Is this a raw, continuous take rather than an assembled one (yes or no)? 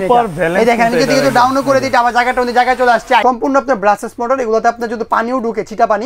no